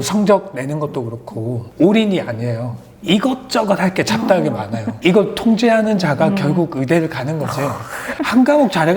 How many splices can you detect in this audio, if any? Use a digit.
3